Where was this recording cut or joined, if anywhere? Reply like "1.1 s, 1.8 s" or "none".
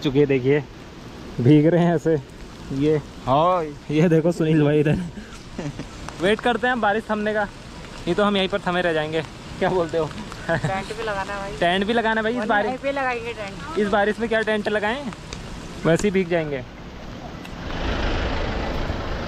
none